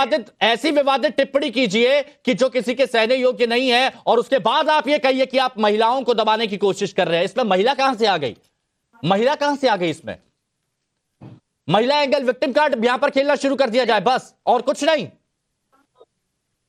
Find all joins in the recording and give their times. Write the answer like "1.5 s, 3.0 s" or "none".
none